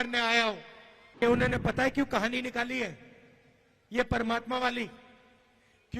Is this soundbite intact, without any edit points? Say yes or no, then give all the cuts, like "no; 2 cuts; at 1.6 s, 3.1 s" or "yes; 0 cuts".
no; 1 cut; at 1.2 s